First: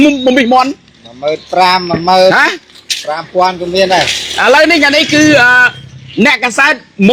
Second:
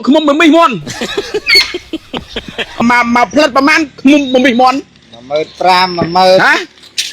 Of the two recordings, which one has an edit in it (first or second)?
second